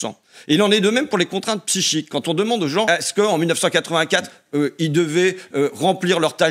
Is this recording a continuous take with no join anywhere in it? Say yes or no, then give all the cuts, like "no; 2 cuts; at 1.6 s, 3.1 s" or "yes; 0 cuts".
no; 1 cut; at 2.9 s